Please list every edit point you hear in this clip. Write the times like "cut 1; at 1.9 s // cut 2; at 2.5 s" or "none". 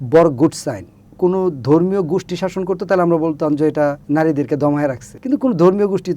cut 1; at 1.0 s // cut 2; at 4.0 s // cut 3; at 5.1 s